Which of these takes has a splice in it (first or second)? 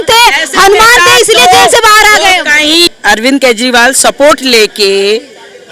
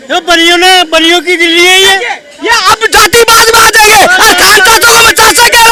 first